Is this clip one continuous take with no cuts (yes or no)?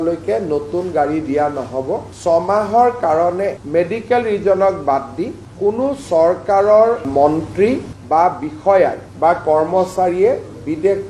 no